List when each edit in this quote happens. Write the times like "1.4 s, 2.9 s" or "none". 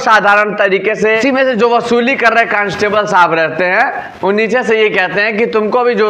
1.3 s